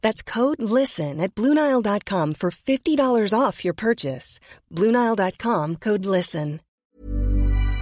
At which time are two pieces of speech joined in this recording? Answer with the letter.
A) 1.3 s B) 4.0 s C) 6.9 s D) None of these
C